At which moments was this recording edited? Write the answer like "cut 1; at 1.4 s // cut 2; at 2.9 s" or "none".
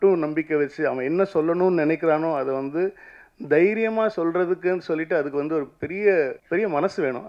cut 1; at 6.4 s